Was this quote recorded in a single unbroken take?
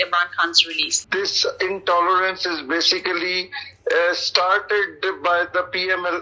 no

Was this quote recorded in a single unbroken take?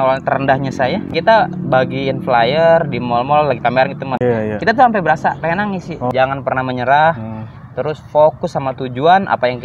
no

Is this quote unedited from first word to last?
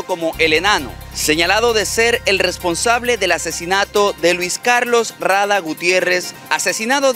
yes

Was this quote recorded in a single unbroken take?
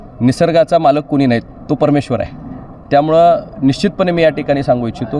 yes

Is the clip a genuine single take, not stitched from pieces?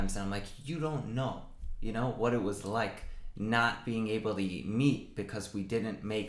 yes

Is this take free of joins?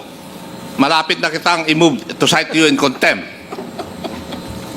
yes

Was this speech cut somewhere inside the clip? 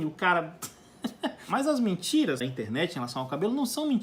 yes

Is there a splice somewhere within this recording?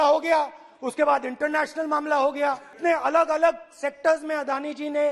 yes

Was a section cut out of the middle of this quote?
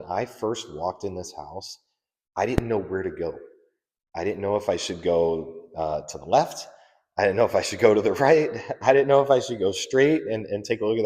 no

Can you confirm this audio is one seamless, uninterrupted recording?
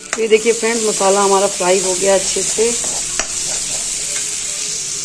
yes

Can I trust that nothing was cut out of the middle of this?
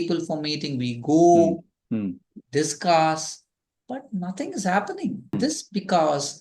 no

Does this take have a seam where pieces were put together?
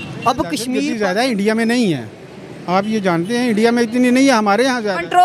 yes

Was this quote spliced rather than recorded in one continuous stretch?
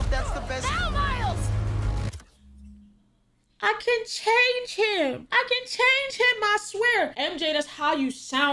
yes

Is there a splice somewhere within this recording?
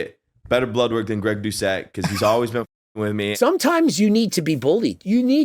yes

